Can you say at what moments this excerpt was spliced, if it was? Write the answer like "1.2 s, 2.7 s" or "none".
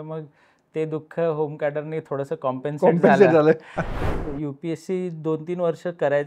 4.1 s